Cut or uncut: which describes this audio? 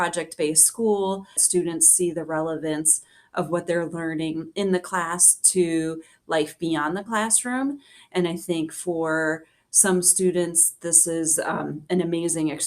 cut